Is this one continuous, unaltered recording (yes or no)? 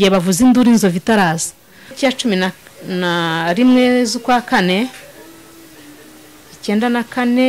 no